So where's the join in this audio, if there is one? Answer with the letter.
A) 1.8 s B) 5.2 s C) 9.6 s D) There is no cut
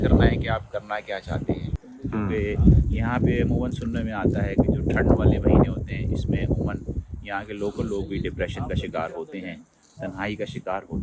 A